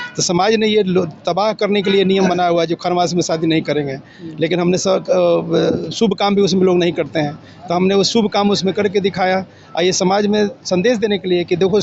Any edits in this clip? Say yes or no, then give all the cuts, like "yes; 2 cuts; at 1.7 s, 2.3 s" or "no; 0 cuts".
no; 0 cuts